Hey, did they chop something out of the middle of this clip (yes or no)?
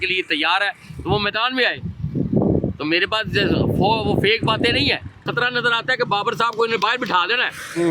yes